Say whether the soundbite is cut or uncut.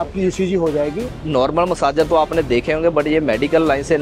cut